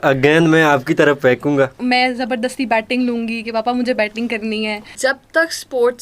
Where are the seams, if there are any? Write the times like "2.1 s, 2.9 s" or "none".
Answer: 1.8 s, 4.9 s